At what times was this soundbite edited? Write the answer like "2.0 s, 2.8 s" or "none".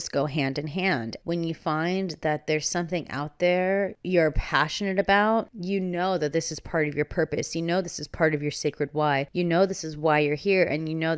1.1 s, 4.0 s, 5.6 s, 9.3 s